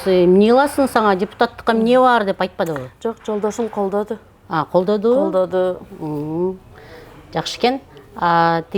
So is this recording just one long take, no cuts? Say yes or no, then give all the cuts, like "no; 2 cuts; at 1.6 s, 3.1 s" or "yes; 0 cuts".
yes; 0 cuts